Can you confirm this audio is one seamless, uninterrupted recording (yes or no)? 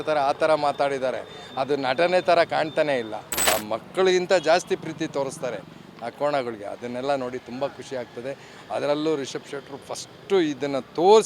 no